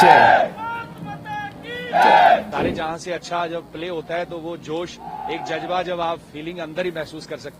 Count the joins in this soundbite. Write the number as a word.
one